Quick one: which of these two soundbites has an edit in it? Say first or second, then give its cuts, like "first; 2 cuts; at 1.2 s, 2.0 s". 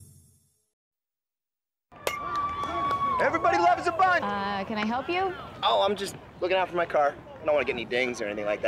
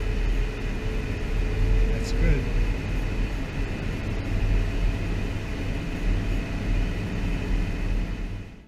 second; 1 cut; at 1.3 s